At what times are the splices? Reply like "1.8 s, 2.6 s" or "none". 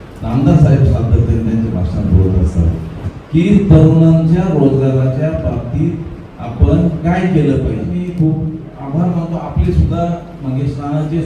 3.0 s, 7.9 s